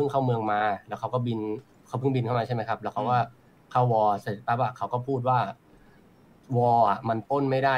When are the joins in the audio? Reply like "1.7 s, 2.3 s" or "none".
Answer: none